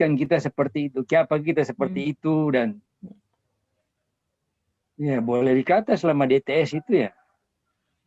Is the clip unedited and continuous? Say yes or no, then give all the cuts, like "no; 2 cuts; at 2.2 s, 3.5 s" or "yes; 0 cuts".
yes; 0 cuts